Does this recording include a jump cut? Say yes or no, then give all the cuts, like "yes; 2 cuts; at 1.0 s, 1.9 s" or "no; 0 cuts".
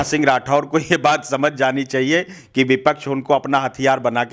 no; 0 cuts